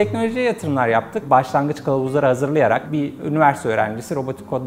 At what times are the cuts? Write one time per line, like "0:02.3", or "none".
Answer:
0:01.2
0:02.8